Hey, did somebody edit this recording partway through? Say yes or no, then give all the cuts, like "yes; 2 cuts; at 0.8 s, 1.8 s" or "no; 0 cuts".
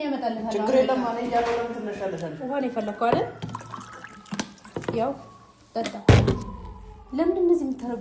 no; 0 cuts